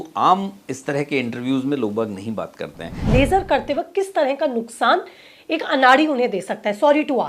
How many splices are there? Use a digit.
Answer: 1